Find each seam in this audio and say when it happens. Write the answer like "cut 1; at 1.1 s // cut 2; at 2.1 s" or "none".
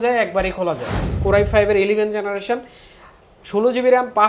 cut 1; at 1.1 s